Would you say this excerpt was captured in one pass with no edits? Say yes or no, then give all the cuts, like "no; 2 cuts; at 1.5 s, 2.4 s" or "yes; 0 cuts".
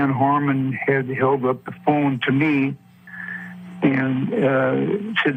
yes; 0 cuts